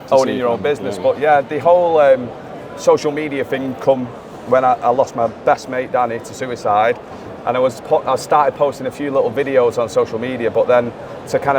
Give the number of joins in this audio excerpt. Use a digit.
0